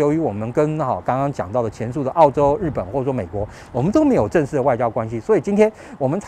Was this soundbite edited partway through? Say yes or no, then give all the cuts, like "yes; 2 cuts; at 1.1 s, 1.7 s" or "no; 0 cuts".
no; 0 cuts